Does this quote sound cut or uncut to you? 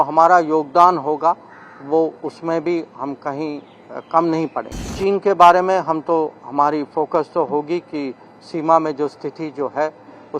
cut